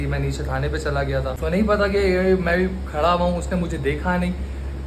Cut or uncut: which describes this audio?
cut